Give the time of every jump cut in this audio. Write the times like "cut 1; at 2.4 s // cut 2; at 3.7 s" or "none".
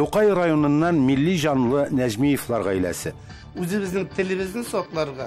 none